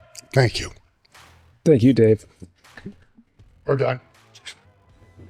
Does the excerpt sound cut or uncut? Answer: uncut